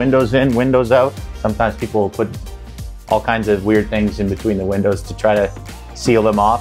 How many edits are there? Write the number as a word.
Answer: one